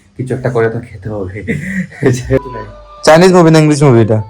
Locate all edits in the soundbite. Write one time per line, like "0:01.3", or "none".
0:02.4